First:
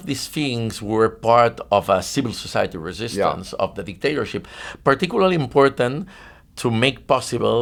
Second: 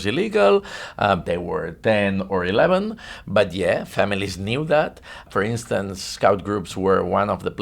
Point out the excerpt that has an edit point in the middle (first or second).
second